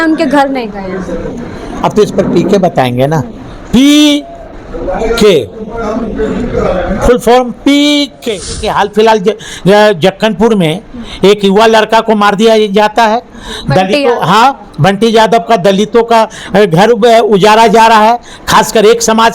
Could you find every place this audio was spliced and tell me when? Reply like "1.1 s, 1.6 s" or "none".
8.7 s